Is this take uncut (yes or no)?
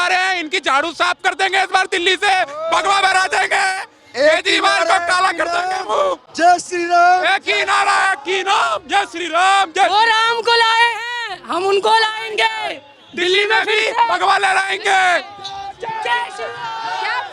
yes